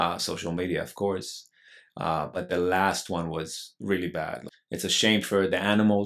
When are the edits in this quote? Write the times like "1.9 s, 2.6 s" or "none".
4.5 s